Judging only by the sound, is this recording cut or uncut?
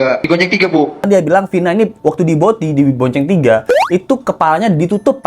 cut